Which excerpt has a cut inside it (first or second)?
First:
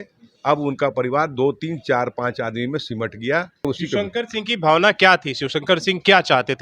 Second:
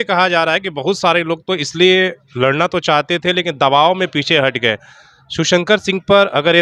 first